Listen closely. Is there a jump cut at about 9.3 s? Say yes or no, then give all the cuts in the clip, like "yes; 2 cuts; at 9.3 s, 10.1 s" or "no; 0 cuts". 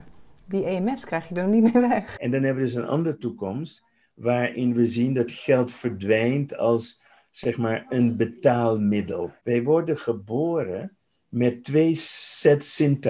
yes; 2 cuts; at 2.1 s, 9.3 s